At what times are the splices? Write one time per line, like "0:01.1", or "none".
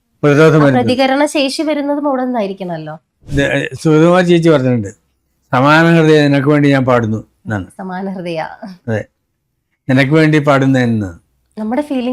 0:03.2